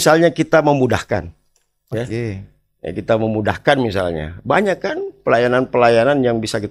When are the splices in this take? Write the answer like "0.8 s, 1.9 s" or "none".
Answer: none